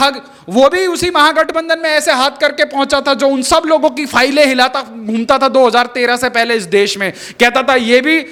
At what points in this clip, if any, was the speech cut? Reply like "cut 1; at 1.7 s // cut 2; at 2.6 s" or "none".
none